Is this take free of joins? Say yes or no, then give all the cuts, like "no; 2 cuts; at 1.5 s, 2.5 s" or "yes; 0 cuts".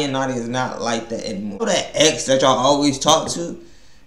no; 1 cut; at 1.6 s